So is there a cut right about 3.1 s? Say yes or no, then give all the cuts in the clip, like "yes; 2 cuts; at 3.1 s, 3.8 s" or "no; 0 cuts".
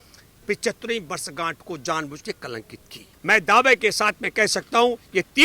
yes; 1 cut; at 3.1 s